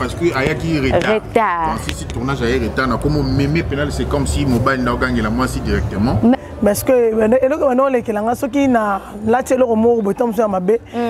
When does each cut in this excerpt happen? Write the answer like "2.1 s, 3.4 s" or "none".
6.4 s